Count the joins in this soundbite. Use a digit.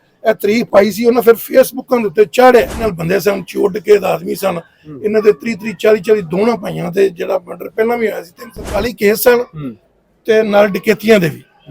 2